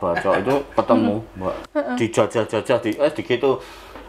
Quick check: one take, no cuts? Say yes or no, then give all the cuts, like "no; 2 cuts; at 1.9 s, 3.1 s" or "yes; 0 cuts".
no; 1 cut; at 1.5 s